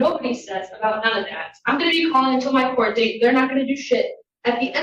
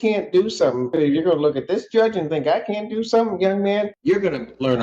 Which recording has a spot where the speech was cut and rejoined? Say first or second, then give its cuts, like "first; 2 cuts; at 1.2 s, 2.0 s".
second; 2 cuts; at 0.9 s, 3.9 s